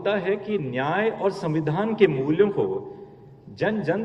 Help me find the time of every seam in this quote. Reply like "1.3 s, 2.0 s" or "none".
none

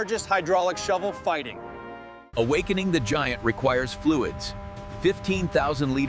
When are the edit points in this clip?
2.3 s

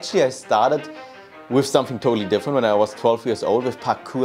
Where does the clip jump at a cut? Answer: none

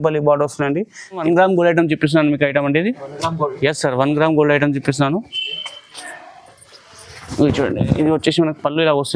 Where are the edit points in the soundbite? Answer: 1.2 s

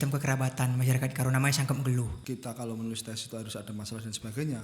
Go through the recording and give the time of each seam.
2.1 s

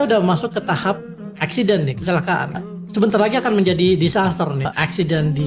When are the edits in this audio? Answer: 2.6 s, 4.7 s

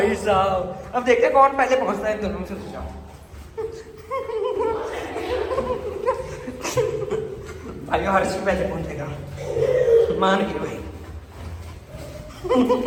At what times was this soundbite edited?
none

